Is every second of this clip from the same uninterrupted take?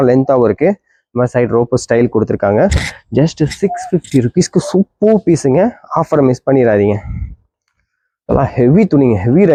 yes; 0 cuts

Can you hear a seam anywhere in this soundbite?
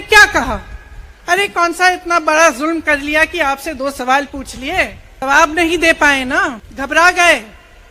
yes; 2 cuts; at 5.2 s, 6.7 s

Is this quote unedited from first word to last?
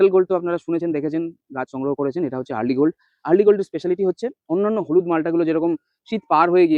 yes; 0 cuts

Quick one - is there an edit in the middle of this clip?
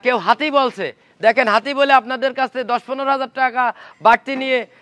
no; 0 cuts

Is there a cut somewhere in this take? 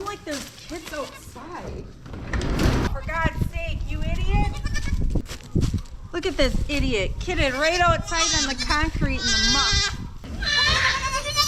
yes; 3 cuts; at 2.9 s, 5.3 s, 10.3 s

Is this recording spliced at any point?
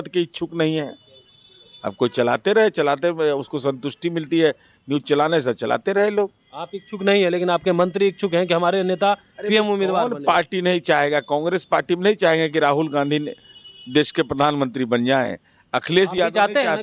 no; 0 cuts

